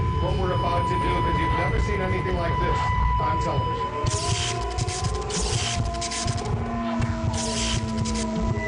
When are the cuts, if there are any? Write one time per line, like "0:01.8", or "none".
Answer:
0:05.6